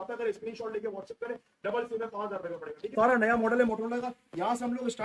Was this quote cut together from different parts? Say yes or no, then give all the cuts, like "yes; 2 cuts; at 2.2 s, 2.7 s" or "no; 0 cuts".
yes; 1 cut; at 2.9 s